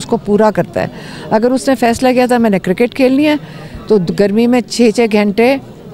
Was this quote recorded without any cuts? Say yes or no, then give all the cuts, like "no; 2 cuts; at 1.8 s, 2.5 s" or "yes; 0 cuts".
yes; 0 cuts